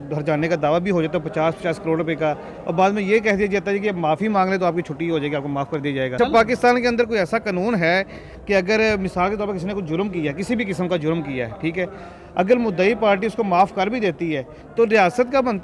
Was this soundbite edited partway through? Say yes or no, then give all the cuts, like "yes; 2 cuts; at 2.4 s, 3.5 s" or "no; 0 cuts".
yes; 1 cut; at 6.2 s